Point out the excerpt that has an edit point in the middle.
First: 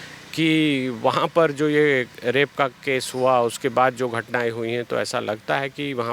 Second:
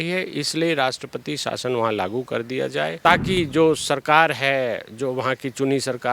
second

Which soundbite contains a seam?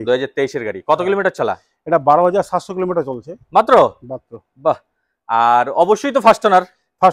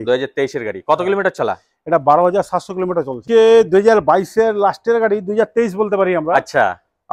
second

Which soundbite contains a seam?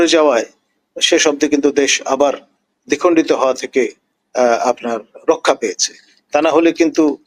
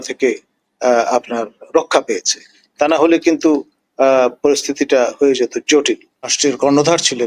second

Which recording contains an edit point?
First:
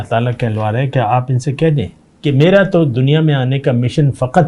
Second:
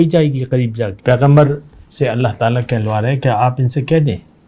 second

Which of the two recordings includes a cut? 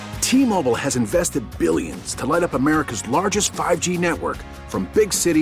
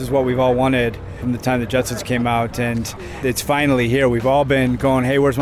second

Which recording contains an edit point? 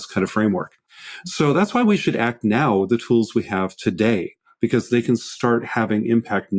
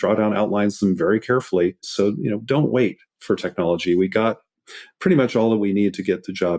second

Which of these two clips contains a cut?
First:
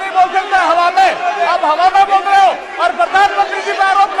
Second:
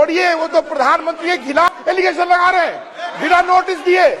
second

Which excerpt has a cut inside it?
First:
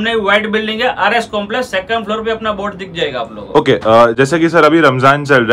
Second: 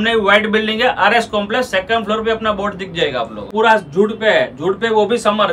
second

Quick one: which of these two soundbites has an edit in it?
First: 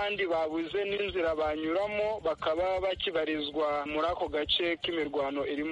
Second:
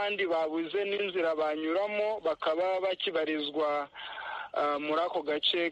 first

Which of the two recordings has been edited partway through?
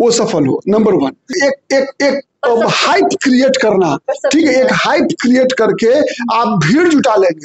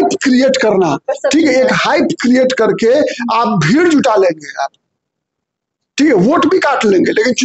first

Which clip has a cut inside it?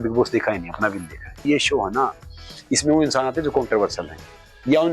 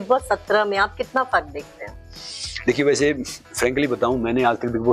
first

